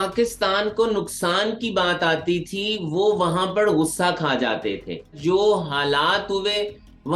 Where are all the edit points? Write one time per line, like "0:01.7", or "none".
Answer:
0:05.2